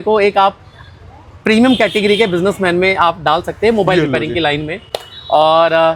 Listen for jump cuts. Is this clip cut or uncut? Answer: uncut